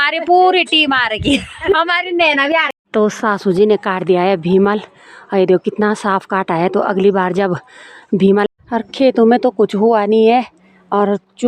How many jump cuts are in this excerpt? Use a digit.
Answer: 2